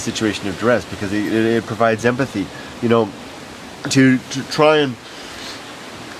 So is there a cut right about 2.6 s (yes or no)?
no